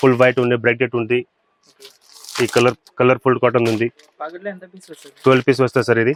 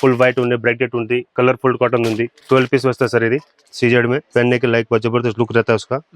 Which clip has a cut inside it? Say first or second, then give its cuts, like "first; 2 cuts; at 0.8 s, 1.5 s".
second; 4 cuts; at 1.3 s, 2.4 s, 3.6 s, 4.3 s